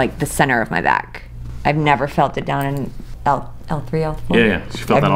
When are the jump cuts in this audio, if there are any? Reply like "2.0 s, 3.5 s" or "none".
3.0 s